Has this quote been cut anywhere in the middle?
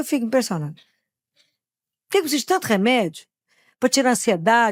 no; 0 cuts

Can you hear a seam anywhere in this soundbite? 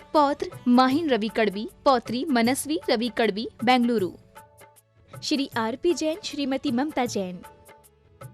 yes; 1 cut; at 7.4 s

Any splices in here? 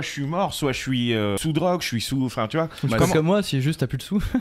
yes; 1 cut; at 1.4 s

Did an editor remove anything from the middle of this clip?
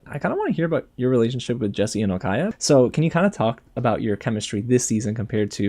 yes; 1 cut; at 2.5 s

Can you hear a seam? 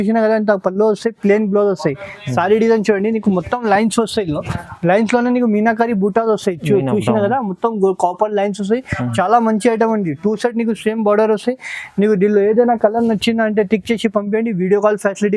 no; 0 cuts

